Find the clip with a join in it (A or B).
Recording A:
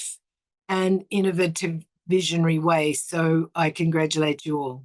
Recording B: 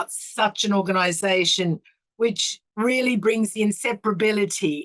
B